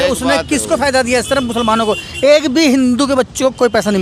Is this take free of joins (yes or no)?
yes